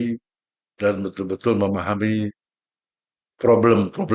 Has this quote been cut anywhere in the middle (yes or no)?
no